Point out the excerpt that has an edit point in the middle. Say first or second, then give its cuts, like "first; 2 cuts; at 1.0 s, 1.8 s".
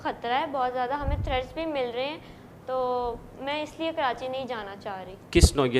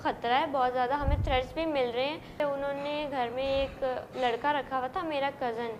second; 1 cut; at 2.4 s